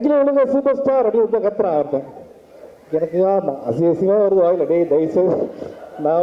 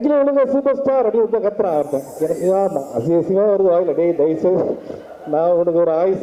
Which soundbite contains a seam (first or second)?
second